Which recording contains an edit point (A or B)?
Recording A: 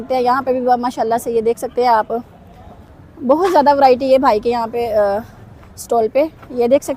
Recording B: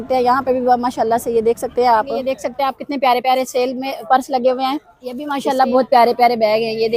B